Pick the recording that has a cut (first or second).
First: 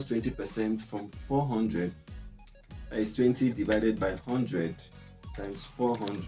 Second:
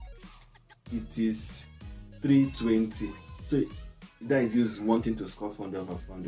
second